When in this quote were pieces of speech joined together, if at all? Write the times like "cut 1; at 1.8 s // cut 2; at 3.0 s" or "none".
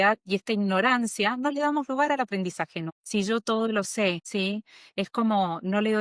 cut 1; at 2.8 s // cut 2; at 4.2 s